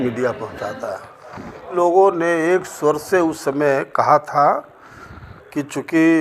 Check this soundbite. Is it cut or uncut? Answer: cut